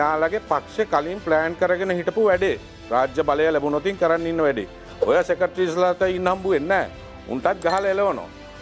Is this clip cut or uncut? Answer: uncut